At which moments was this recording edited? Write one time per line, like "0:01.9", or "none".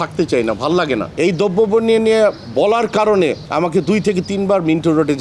0:01.1
0:03.4